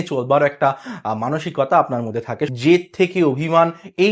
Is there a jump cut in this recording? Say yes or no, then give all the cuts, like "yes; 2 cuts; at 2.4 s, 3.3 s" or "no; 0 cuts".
yes; 1 cut; at 2.5 s